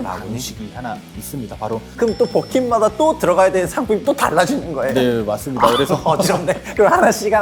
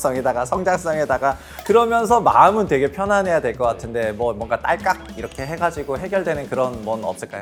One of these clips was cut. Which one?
first; 1 cut; at 1.9 s

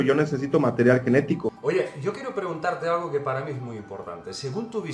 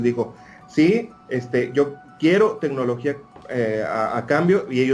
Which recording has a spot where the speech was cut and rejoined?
first; 1 cut; at 1.5 s

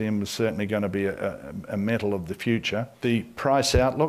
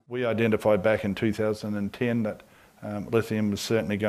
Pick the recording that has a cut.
first; 1 cut; at 2.9 s

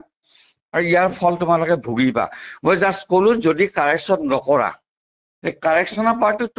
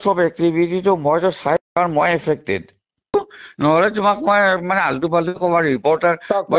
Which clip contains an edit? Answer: second; 1 cut; at 3.1 s

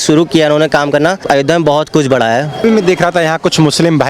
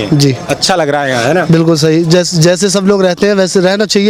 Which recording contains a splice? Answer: first; 2 cuts; at 1.2 s, 2.6 s

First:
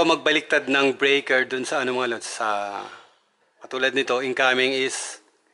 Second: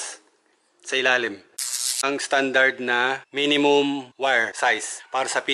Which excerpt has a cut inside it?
second; 3 cuts; at 2.0 s, 3.2 s, 4.7 s

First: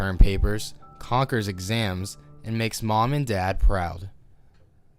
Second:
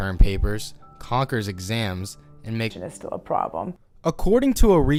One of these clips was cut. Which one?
first; 1 cut; at 2.8 s

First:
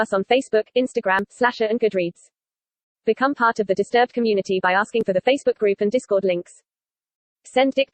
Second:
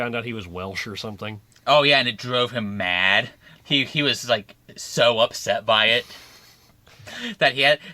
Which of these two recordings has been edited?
second; 1 cut; at 3.4 s

